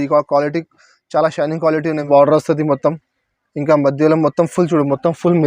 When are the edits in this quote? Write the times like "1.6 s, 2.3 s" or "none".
2.1 s